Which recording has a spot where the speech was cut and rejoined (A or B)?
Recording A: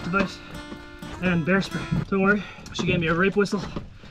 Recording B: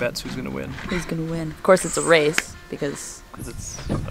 A